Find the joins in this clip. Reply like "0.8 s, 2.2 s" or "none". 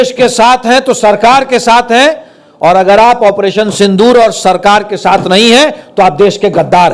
none